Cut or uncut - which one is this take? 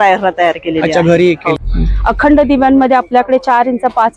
cut